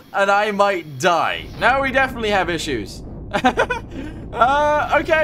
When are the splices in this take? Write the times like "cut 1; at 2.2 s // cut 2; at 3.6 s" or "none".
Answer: cut 1; at 1.4 s